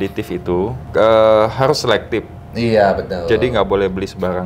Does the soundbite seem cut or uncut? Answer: uncut